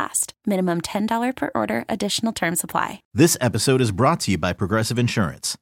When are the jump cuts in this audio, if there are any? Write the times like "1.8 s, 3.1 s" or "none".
3.1 s